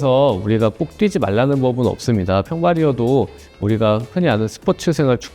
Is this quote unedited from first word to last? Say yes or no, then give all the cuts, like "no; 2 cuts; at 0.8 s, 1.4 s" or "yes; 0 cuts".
yes; 0 cuts